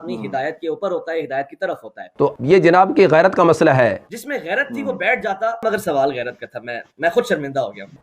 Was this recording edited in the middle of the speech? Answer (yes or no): yes